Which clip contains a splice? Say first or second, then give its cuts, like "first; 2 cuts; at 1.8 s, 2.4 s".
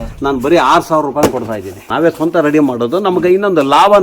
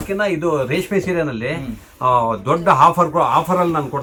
first; 1 cut; at 1.8 s